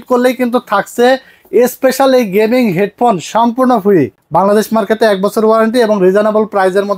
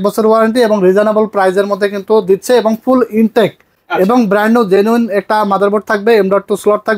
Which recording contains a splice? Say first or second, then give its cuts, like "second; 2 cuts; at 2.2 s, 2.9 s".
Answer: first; 1 cut; at 4.2 s